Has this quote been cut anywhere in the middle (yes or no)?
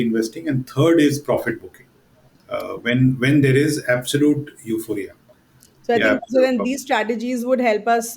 no